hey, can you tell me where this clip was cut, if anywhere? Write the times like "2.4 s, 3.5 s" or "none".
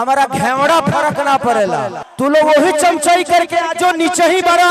2.0 s